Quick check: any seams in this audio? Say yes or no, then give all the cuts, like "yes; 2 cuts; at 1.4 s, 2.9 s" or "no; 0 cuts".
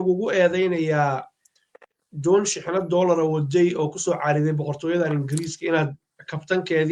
no; 0 cuts